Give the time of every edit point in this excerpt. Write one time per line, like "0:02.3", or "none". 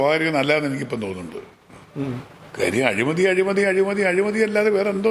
none